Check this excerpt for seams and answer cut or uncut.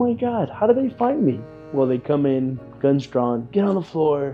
uncut